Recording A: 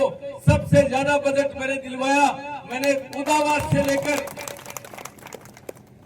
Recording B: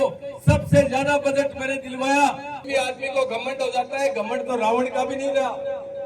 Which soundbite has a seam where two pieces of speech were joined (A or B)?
B